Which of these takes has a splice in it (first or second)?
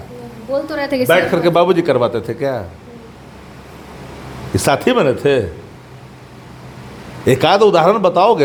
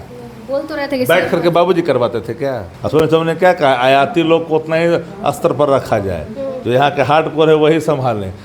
second